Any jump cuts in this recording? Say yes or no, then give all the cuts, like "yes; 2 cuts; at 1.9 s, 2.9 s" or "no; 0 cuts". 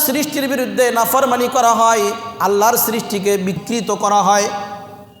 yes; 1 cut; at 3.6 s